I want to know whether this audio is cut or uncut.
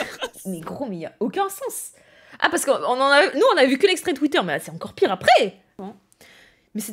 cut